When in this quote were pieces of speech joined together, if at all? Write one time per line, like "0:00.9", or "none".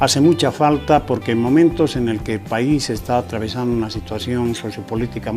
0:01.4